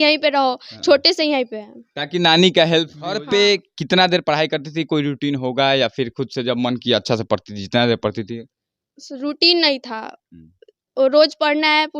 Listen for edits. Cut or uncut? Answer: cut